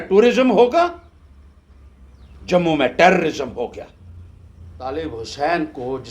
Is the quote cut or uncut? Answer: cut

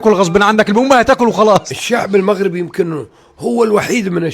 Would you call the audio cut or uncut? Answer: cut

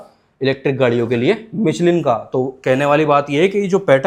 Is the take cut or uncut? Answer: uncut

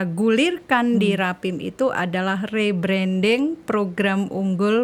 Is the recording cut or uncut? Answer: uncut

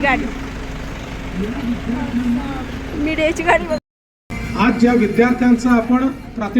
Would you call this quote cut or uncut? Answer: cut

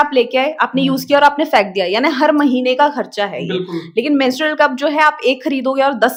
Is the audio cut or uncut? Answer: uncut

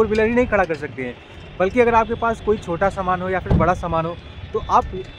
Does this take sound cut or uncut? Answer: uncut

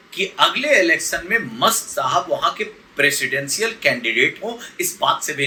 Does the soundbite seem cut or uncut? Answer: uncut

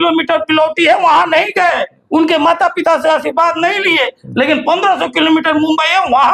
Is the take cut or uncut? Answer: uncut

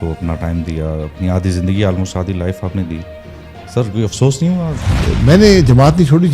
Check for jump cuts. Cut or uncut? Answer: cut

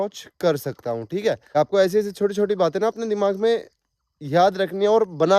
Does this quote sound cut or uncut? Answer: cut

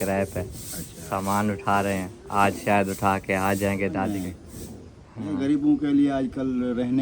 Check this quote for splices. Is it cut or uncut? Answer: cut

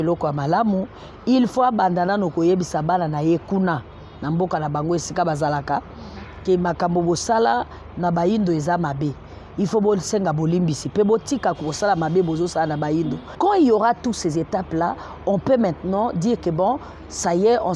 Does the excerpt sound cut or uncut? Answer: cut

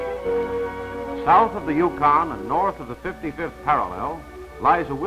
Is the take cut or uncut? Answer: uncut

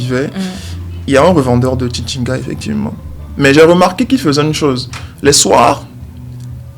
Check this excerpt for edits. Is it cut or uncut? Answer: uncut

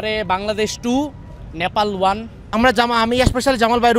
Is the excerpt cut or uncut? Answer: cut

